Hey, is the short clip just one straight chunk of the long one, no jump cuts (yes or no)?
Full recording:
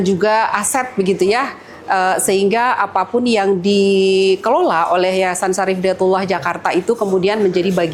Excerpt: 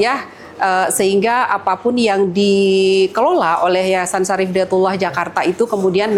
yes